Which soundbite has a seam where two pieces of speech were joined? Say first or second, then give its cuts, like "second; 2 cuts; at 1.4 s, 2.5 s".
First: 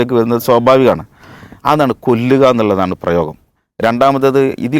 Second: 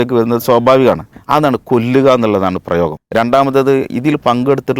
second; 2 cuts; at 1.1 s, 3.0 s